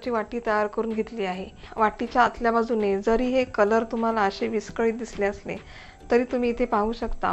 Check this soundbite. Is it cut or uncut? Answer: cut